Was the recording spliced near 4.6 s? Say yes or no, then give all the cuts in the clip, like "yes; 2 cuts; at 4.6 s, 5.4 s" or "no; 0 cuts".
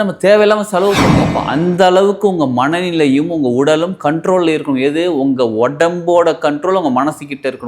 no; 1 cut; at 1.3 s